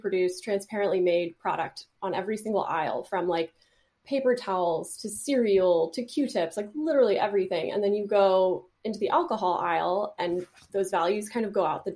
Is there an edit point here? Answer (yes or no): no